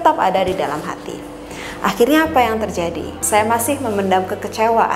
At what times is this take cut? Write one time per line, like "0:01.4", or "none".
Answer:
0:03.2